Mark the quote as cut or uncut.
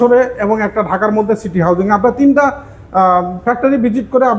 uncut